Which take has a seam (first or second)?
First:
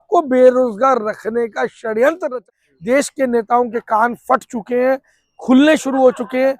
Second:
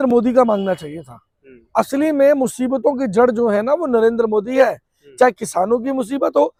first